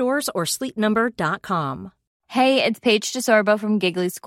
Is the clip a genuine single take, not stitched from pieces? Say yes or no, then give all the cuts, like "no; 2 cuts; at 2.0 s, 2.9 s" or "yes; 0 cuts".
no; 1 cut; at 2.1 s